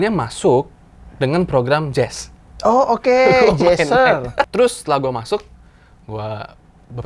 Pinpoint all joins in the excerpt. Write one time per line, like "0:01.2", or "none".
0:04.5